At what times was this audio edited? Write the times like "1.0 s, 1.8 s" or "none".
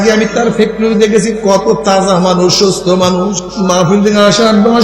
3.5 s